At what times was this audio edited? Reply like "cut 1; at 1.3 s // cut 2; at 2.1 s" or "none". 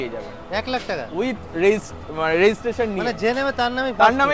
none